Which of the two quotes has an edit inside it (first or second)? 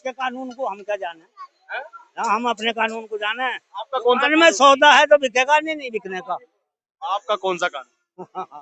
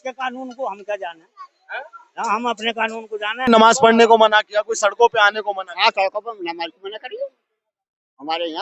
second